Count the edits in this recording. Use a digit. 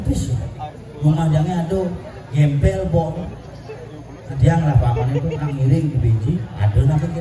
0